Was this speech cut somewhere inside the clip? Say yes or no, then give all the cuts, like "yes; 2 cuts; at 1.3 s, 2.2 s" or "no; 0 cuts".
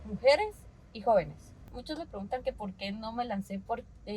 yes; 1 cut; at 1.7 s